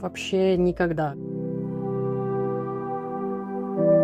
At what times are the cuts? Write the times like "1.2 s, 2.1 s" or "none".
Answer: 1.2 s